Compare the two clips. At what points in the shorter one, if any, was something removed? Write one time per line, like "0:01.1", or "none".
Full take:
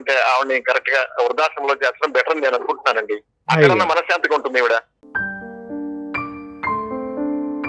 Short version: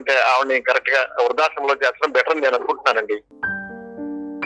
0:03.3